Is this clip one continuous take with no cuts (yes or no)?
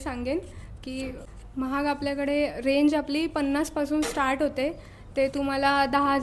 no